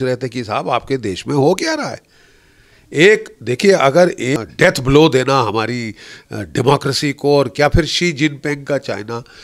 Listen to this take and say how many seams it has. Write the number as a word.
one